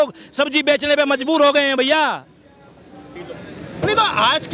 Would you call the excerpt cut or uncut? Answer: uncut